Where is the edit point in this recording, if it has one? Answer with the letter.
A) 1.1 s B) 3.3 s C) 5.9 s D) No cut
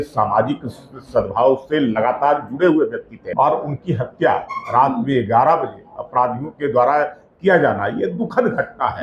B